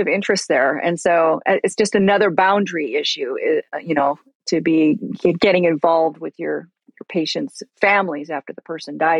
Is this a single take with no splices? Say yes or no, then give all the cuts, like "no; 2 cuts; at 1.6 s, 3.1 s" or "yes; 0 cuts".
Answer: yes; 0 cuts